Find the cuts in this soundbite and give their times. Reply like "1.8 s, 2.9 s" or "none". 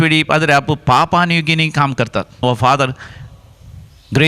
2.4 s